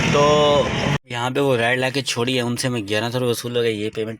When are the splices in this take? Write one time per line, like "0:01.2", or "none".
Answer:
0:00.9